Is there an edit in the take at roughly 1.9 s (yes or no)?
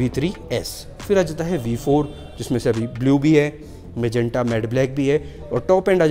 no